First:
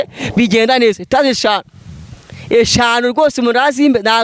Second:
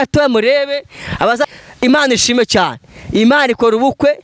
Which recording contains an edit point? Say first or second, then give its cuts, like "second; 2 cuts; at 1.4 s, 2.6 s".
second; 1 cut; at 1.5 s